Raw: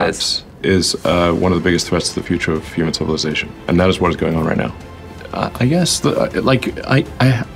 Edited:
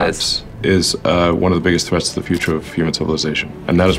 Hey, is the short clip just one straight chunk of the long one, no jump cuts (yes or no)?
yes